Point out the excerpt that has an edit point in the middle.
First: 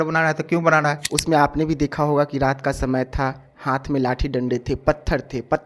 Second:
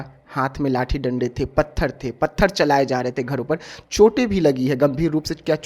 first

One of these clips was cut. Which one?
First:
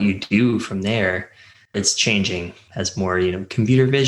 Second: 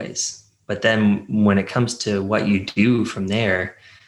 first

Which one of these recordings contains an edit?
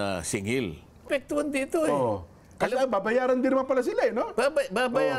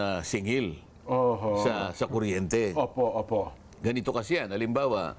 first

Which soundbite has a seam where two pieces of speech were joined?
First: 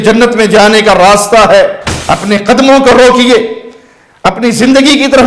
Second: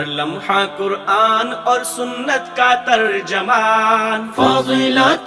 first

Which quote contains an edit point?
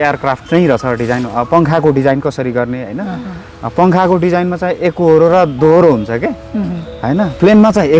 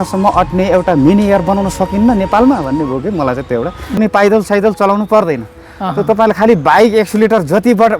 second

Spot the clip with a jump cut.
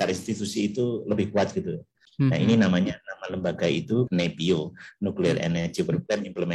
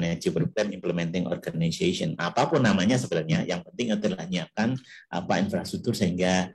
first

